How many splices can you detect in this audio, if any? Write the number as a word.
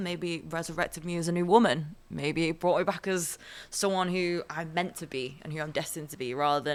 zero